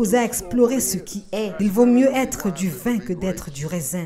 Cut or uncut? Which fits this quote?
cut